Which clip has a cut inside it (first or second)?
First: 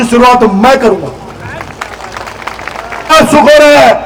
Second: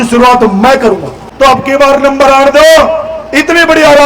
second